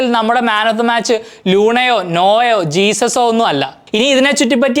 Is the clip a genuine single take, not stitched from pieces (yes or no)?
yes